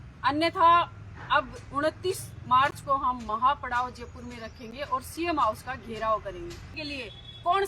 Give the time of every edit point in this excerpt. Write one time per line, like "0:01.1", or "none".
0:06.7